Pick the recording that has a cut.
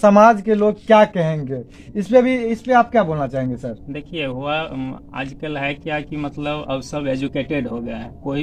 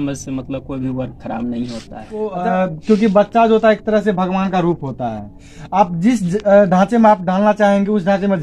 second; 1 cut; at 2.3 s

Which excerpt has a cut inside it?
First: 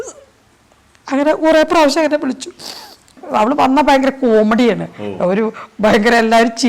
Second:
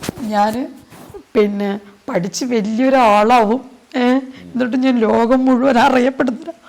first; 1 cut; at 3.2 s

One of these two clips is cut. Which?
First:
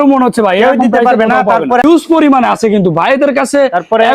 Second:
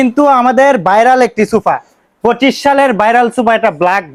first; 1 cut; at 1.8 s

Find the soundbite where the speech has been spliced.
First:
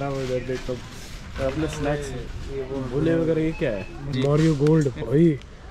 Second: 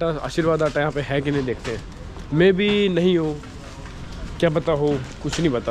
first; 1 cut; at 4.1 s

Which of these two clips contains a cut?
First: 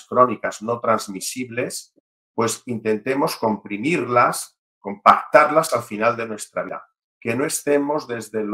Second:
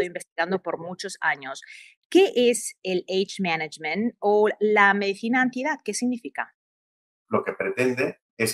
second; 1 cut; at 7.1 s

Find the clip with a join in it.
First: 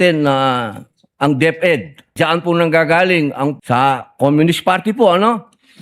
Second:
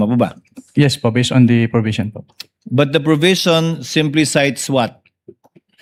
first; 2 cuts; at 2.1 s, 3.6 s

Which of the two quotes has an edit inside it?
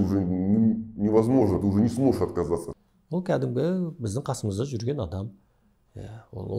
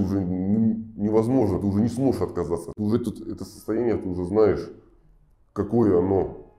first; 1 cut; at 2.7 s

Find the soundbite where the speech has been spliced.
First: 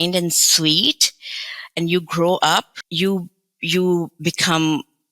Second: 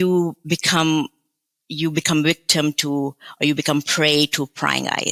first; 1 cut; at 2.8 s

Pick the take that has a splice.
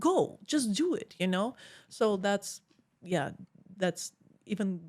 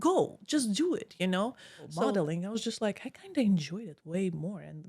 second; 1 cut; at 2.1 s

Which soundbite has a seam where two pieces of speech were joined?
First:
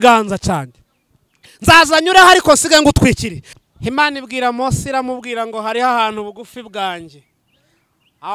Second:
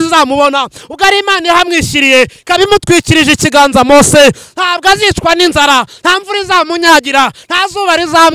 first; 1 cut; at 3.6 s

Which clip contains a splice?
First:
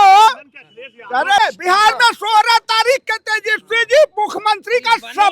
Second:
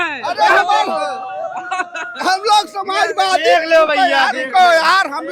first; 1 cut; at 1.4 s

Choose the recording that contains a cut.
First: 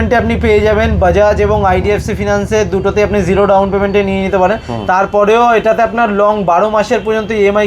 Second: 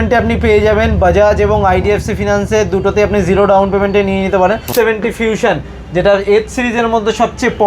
second; 1 cut; at 4.7 s

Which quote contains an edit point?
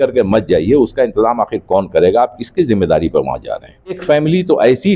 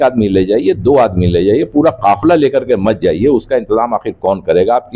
first; 1 cut; at 4.0 s

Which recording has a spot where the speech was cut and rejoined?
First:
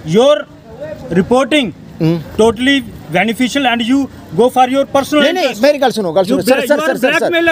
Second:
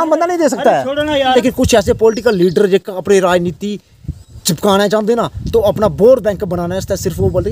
second; 1 cut; at 1.3 s

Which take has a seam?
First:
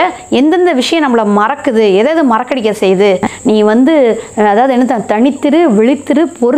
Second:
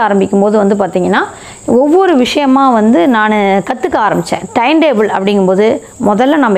first; 1 cut; at 3.3 s

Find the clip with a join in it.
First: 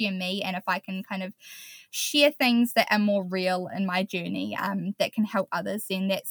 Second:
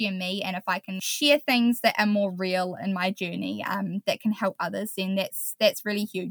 second; 1 cut; at 1.0 s

